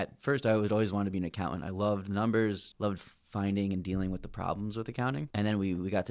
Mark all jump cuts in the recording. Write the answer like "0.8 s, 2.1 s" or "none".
2.7 s, 5.3 s